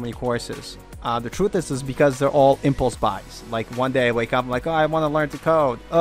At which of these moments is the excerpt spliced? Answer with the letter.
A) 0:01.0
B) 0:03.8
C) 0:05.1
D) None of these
D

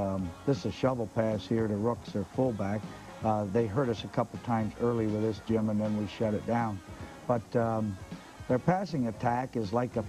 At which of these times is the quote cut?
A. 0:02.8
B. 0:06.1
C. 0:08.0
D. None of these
A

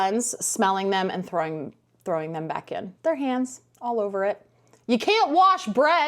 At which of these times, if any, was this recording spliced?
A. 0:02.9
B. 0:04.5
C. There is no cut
A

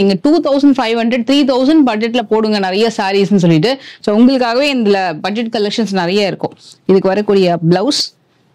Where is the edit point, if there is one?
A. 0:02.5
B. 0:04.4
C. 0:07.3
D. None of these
D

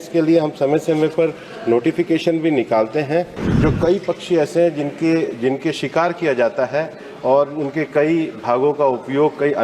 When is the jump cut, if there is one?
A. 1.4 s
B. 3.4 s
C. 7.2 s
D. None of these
B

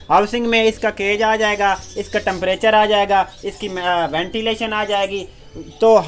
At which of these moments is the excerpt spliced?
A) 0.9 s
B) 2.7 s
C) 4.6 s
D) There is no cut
D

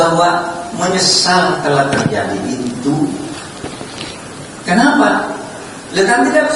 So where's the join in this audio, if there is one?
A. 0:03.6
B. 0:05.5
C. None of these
C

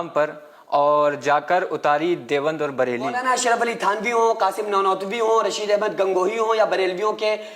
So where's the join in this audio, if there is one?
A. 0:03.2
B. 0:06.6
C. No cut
A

